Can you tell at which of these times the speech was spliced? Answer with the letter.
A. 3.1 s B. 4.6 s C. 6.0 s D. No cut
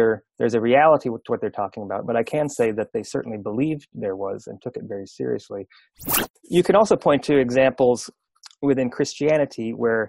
C